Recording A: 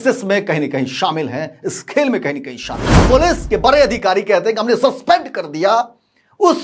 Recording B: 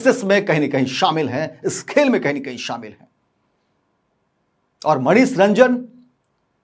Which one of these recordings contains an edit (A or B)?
A